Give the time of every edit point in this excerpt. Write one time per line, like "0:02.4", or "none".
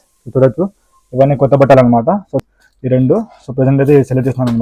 0:02.4